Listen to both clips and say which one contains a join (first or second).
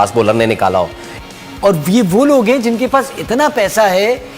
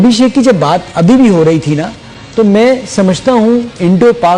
first